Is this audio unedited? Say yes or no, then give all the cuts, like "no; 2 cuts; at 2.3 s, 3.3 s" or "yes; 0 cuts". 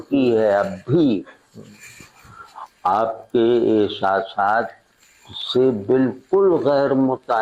yes; 0 cuts